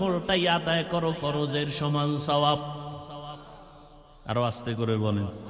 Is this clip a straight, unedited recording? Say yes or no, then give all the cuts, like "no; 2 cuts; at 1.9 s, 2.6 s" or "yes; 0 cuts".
yes; 0 cuts